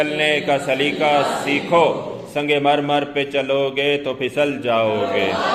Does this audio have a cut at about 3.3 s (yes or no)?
no